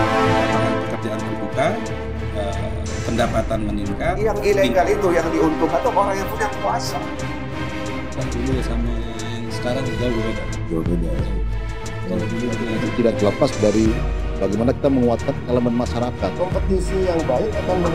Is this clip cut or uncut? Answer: uncut